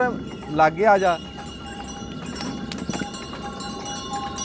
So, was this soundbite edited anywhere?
no; 0 cuts

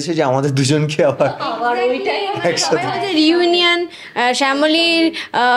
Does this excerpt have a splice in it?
no; 0 cuts

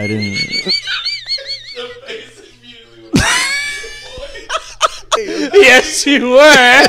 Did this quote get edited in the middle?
yes; 1 cut; at 5.2 s

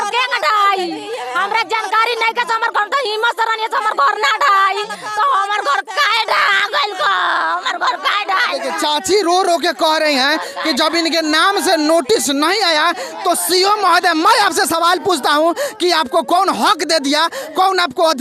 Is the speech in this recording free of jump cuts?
yes; 0 cuts

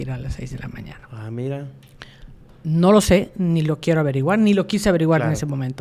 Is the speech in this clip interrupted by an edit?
no; 0 cuts

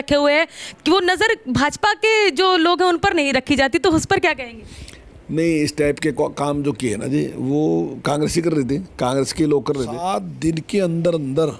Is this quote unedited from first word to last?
no; 1 cut; at 10.0 s

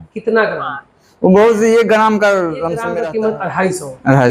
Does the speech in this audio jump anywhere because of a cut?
yes; 1 cut; at 2.9 s

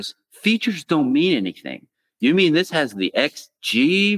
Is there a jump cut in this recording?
no; 0 cuts

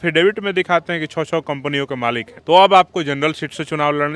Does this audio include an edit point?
yes; 1 cut; at 2.3 s

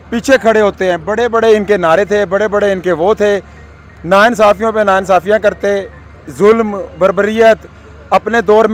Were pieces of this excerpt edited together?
no; 0 cuts

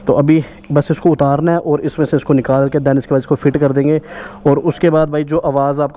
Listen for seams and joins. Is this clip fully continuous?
yes; 0 cuts

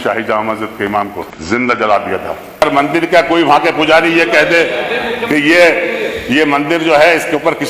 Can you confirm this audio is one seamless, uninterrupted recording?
no; 2 cuts; at 1.3 s, 2.6 s

